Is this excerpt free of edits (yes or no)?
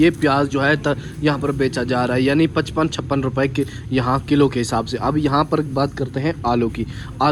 yes